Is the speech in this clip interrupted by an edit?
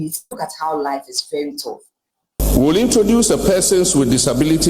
yes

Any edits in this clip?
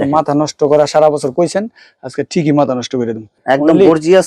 yes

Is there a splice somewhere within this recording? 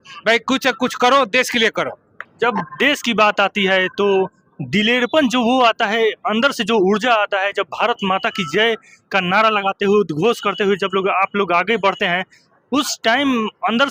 no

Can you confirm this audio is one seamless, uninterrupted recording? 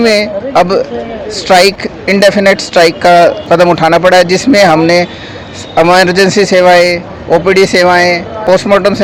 yes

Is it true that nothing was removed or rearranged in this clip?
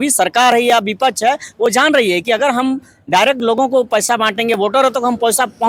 yes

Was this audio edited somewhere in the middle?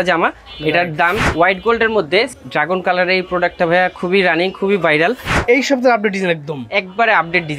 yes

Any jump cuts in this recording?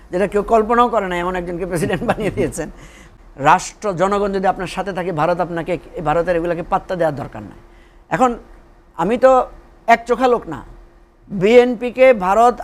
yes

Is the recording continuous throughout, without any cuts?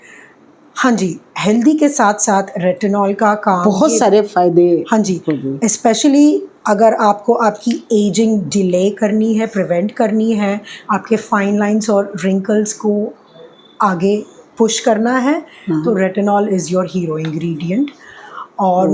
yes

